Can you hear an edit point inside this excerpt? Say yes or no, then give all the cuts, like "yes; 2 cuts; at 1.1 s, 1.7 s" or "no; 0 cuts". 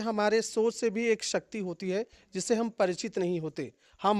no; 0 cuts